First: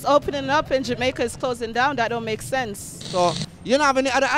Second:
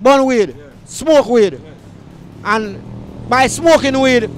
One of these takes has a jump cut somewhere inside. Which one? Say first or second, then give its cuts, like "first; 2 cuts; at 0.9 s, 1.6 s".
first; 1 cut; at 3.1 s